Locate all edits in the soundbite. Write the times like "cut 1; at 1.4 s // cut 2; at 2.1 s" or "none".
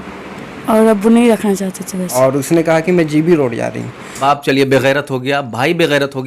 cut 1; at 2.2 s // cut 2; at 4.1 s